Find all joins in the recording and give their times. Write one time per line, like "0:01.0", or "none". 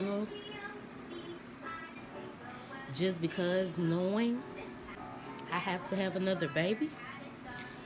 0:02.0
0:04.9